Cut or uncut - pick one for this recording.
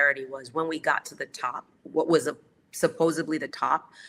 cut